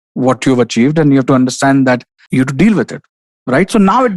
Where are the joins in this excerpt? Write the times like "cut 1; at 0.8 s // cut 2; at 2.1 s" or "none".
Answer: cut 1; at 2.1 s